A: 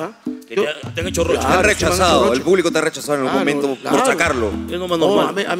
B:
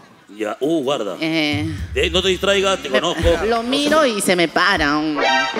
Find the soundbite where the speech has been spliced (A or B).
B